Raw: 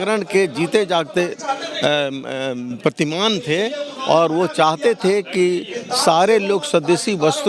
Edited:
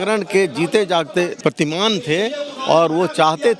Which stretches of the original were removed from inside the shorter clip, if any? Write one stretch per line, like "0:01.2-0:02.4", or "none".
0:01.4-0:02.8